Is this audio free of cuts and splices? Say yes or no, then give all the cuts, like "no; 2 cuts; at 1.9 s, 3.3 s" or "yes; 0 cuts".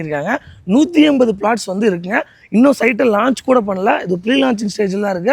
yes; 0 cuts